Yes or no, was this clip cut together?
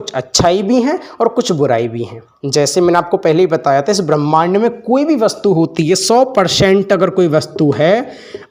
no